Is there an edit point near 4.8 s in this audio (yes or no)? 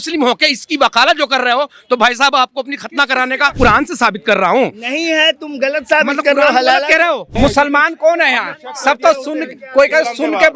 no